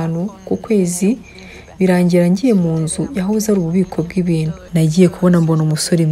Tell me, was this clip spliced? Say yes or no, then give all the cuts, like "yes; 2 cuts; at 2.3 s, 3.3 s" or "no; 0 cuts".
yes; 1 cut; at 4.6 s